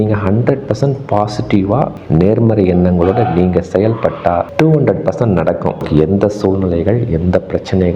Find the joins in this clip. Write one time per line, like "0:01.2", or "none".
0:05.8